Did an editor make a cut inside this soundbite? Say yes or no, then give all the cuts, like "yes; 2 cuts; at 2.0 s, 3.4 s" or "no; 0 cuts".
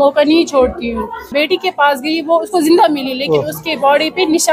yes; 1 cut; at 1.5 s